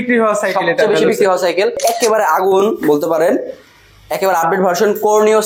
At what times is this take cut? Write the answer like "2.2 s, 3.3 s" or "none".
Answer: 1.8 s